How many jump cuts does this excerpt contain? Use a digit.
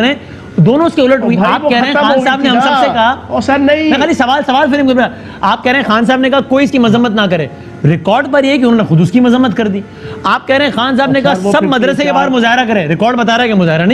0